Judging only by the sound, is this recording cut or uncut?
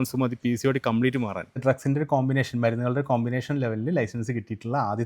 cut